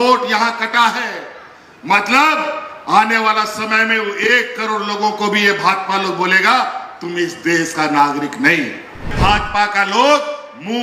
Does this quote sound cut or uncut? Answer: cut